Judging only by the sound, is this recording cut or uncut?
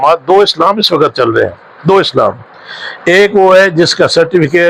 uncut